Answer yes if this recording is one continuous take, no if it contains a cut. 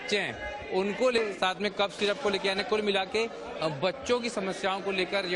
no